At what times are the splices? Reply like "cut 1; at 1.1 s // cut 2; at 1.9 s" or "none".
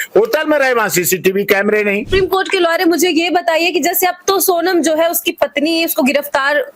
cut 1; at 2.1 s